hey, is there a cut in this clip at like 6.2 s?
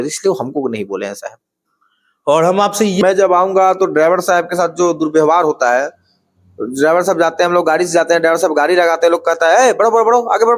no; 1 cut; at 3.0 s

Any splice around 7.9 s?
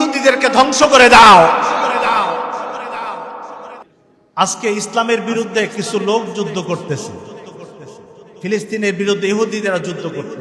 no; 1 cut; at 3.9 s

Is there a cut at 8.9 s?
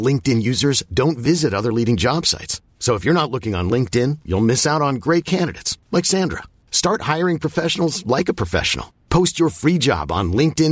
no; 0 cuts

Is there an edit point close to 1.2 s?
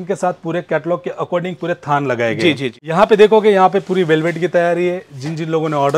no; 1 cut; at 2.8 s

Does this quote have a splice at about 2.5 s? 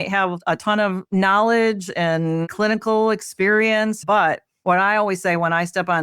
yes; 2 cuts; at 2.5 s, 4.0 s

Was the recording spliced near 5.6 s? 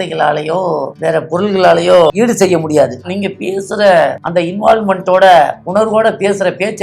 yes; 5 cuts; at 0.9 s, 2.1 s, 3.1 s, 4.2 s, 5.6 s

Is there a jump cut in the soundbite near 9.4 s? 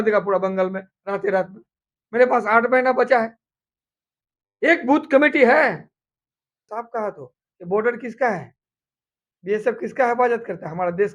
no; 1 cut; at 6.7 s

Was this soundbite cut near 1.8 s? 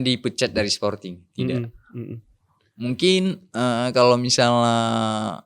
no; 0 cuts

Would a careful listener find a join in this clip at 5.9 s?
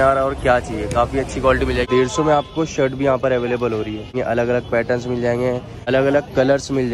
yes; 3 cuts; at 1.9 s, 4.1 s, 5.9 s

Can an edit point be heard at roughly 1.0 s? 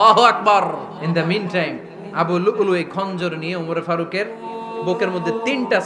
yes; 1 cut; at 1.0 s

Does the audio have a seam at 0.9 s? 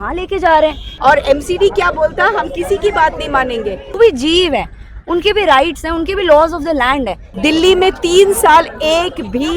yes; 3 cuts; at 0.9 s, 3.9 s, 7.2 s

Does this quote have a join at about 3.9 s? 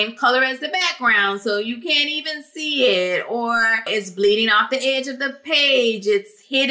yes; 1 cut; at 3.9 s

